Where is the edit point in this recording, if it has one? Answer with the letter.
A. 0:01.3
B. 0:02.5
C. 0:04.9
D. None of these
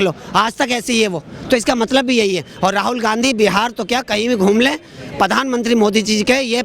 D